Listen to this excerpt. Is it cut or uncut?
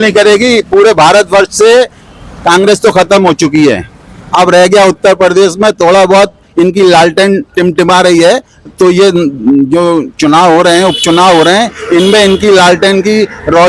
uncut